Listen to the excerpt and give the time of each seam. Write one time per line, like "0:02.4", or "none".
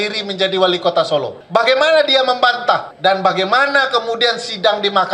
0:01.4
0:02.9